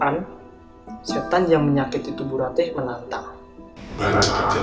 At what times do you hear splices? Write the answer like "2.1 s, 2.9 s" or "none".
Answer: none